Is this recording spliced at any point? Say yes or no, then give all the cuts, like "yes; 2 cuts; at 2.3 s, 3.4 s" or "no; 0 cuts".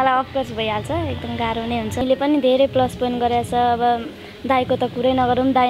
yes; 1 cut; at 2.0 s